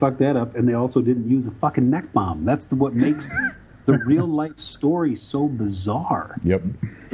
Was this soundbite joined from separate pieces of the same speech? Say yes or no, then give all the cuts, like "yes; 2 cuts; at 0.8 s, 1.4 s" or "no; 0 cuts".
no; 0 cuts